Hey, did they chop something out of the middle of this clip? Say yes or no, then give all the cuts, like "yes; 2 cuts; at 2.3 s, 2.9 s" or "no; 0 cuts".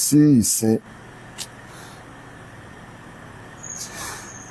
no; 0 cuts